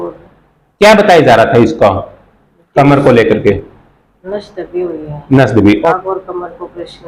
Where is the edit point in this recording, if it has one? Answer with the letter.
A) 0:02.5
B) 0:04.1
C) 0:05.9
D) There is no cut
C